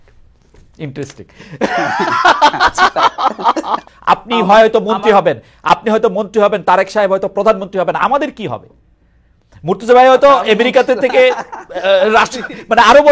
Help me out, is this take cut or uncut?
cut